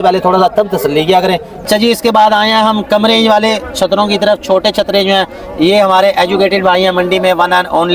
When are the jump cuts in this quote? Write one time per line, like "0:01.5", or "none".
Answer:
0:01.7